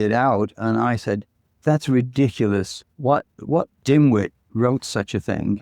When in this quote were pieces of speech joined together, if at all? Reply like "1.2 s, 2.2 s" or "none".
3.1 s, 4.4 s